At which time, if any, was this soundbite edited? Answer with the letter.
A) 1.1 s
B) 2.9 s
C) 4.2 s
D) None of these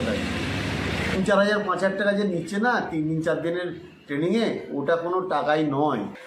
A